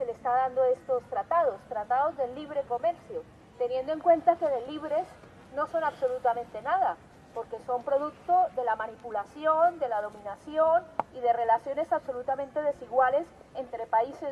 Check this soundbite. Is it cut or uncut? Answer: uncut